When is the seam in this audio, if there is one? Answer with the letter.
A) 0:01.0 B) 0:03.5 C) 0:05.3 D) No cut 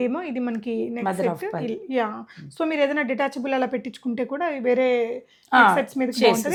D